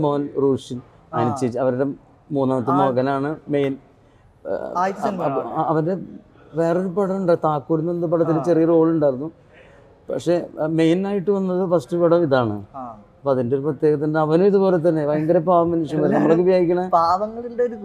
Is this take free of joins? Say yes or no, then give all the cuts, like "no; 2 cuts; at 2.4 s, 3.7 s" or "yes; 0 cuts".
yes; 0 cuts